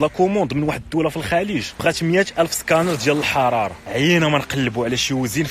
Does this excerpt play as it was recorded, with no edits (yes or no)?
no